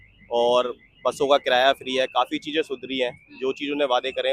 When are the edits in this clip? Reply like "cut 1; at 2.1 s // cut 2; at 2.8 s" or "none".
none